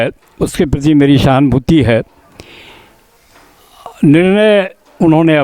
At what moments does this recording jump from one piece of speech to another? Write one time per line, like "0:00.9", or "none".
none